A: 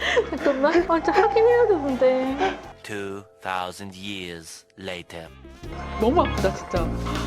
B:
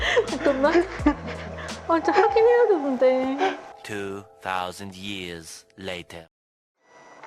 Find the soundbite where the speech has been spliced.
A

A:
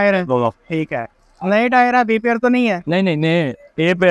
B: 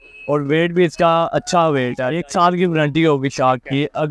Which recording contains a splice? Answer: B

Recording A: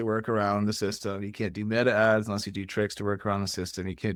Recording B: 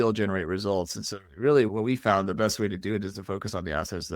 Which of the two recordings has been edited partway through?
B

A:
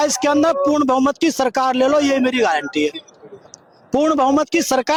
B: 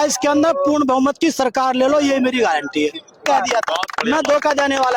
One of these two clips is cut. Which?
B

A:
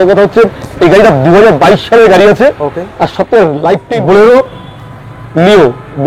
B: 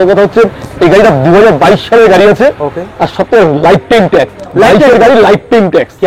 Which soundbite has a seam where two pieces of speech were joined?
A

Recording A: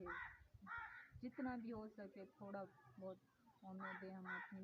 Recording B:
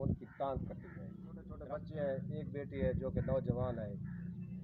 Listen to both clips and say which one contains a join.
B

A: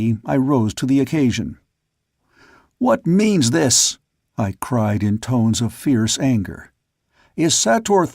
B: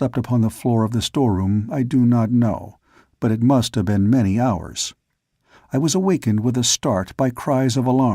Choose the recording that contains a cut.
A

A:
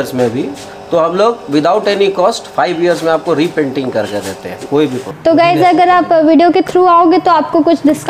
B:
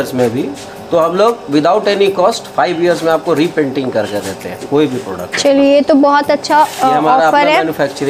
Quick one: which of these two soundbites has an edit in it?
A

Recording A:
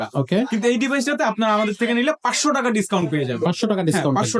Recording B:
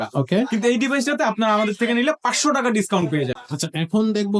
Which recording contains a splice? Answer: B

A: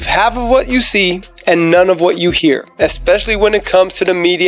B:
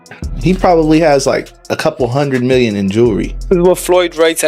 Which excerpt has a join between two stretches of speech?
B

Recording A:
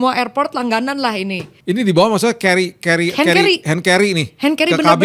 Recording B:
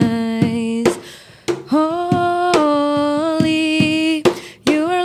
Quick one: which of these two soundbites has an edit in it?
A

